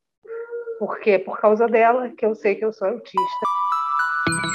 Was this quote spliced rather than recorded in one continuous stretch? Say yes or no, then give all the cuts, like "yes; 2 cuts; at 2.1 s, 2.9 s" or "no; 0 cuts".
yes; 1 cut; at 3.6 s